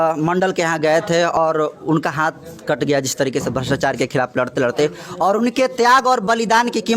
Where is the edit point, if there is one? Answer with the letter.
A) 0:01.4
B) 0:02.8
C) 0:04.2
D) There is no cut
A